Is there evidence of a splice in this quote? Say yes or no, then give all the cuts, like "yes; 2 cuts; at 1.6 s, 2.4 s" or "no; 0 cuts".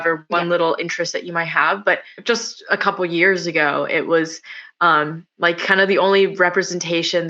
yes; 1 cut; at 2.1 s